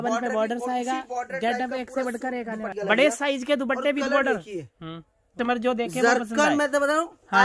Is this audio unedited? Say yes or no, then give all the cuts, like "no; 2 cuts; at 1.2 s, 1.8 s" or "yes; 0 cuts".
no; 2 cuts; at 2.7 s, 5.2 s